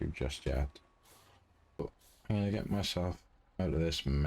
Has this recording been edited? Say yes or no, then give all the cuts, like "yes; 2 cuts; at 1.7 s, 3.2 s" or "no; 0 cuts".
yes; 1 cut; at 1.8 s